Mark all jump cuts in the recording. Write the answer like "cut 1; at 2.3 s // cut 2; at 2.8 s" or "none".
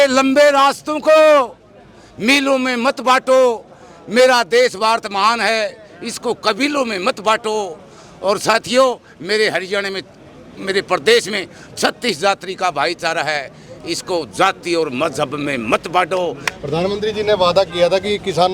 cut 1; at 16.5 s